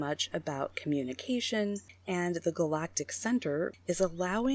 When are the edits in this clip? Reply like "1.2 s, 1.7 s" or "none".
1.9 s, 3.7 s